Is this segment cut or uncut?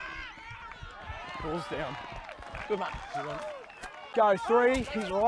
cut